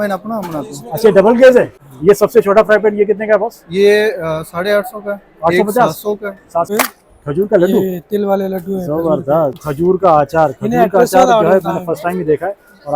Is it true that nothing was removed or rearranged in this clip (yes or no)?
no